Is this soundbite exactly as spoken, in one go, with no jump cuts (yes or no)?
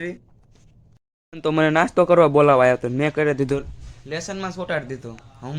no